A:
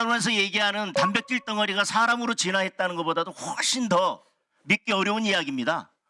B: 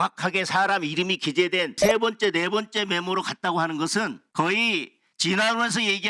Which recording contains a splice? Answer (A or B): B